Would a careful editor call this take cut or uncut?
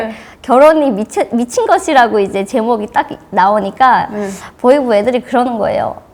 uncut